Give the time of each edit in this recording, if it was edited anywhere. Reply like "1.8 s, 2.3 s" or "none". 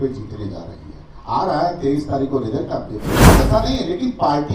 3.4 s